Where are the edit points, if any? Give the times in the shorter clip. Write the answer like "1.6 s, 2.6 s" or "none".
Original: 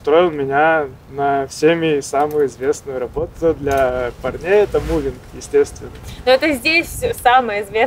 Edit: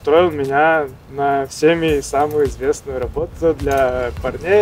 none